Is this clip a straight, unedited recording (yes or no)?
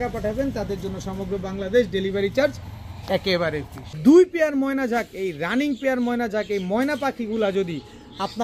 no